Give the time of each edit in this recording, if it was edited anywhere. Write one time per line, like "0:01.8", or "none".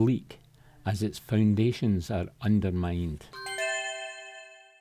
0:03.3